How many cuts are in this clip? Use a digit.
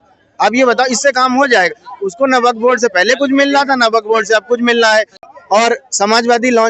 1